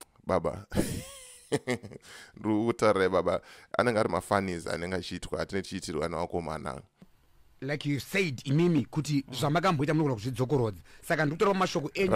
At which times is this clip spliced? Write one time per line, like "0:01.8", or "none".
0:07.0